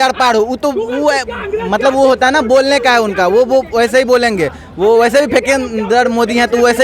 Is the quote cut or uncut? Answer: uncut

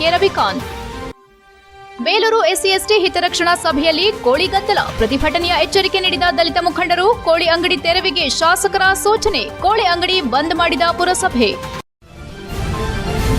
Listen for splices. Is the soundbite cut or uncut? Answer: cut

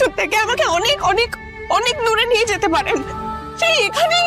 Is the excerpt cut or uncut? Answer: cut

